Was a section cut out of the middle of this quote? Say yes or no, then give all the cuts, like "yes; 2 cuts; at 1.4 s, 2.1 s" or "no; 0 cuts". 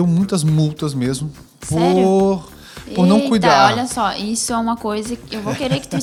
no; 0 cuts